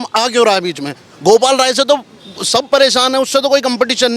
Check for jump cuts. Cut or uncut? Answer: uncut